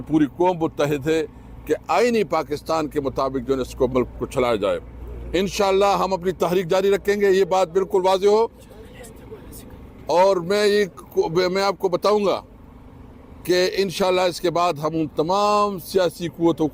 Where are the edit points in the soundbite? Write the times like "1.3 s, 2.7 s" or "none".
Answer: none